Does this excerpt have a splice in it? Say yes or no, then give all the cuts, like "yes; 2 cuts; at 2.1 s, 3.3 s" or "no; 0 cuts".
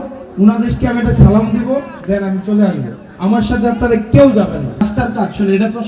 yes; 1 cut; at 4.8 s